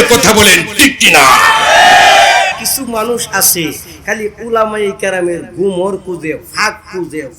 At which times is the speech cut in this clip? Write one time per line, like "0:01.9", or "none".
0:02.6